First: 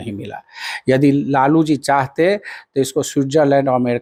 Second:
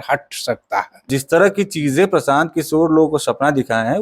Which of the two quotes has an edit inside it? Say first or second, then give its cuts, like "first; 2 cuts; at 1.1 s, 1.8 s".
second; 1 cut; at 1.1 s